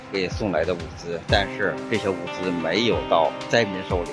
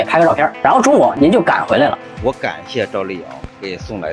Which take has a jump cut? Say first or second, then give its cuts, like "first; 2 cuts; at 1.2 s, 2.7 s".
second; 2 cuts; at 1.1 s, 2.1 s